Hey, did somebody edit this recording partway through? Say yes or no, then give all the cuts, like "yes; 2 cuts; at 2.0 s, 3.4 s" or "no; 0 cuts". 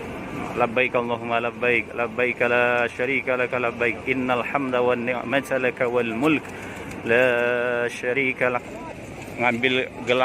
yes; 1 cut; at 8.7 s